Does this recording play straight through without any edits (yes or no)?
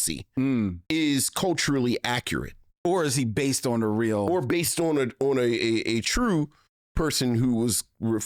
yes